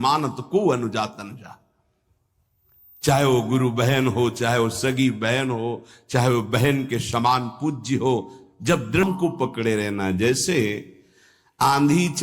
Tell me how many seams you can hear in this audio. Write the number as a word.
one